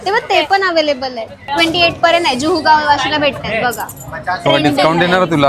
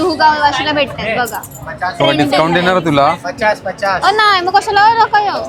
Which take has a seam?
first; 1 cut; at 1.4 s

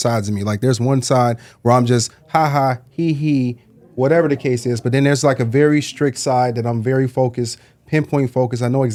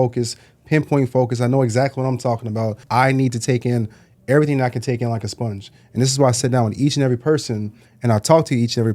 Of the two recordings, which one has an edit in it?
second; 1 cut; at 2.8 s

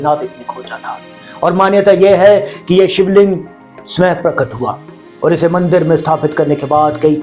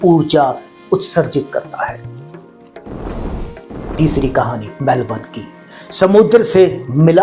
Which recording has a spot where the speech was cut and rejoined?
second; 2 cuts; at 2.8 s, 3.9 s

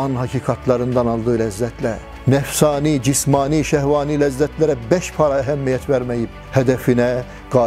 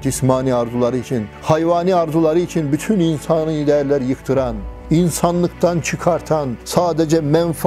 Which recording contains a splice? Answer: first; 1 cut; at 6.4 s

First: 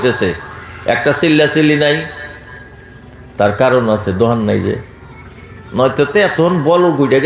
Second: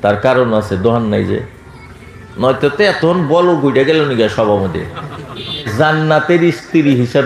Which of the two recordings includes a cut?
second; 1 cut; at 5.7 s

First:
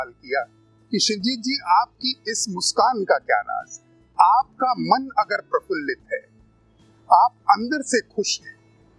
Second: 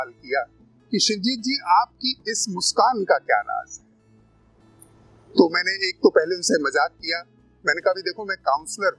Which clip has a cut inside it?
first; 1 cut; at 4.1 s

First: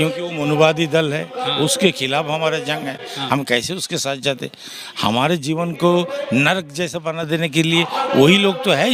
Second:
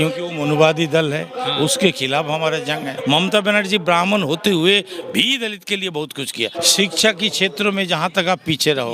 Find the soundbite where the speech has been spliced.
second; 2 cuts; at 2.9 s, 6.5 s

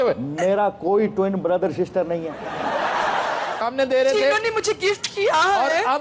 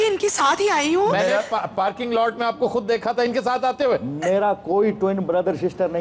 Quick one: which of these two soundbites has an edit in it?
first; 1 cut; at 3.6 s

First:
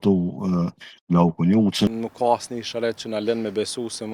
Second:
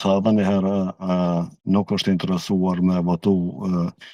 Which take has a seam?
first; 1 cut; at 1.9 s

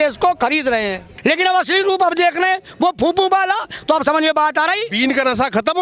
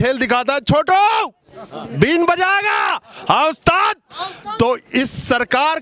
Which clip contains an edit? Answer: first; 1 cut; at 1.1 s

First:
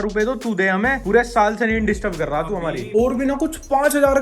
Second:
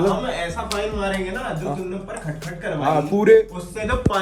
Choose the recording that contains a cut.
first; 1 cut; at 2.8 s

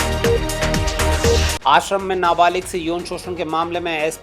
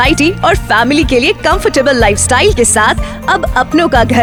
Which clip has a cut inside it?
first; 1 cut; at 1.4 s

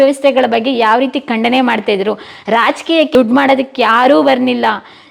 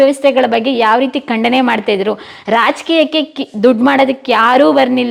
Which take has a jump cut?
first; 1 cut; at 3.1 s

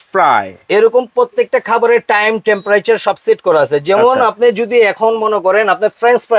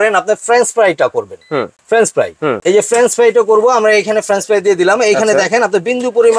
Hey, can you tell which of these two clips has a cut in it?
second; 2 cuts; at 1.8 s, 2.6 s

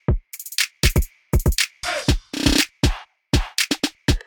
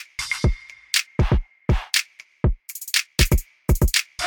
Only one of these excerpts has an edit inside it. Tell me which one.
second; 1 cut; at 1.0 s

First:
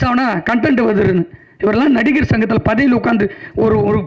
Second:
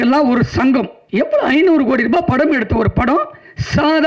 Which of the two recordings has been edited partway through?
second; 1 cut; at 1.0 s

